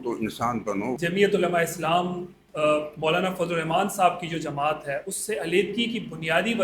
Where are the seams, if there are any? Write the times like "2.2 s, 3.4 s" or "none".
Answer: 0.9 s

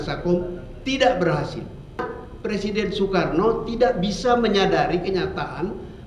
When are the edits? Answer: 2.0 s

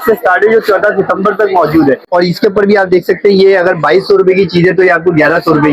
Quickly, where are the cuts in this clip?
2.0 s

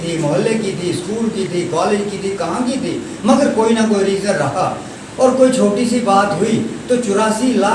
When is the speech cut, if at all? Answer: none

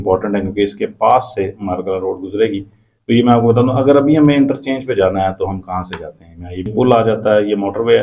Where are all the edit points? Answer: 6.7 s

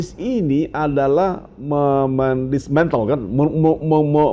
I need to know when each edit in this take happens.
none

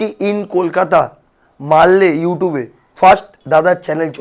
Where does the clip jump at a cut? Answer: 3.3 s

